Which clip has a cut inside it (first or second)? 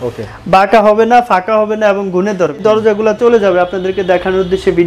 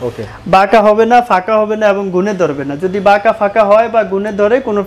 first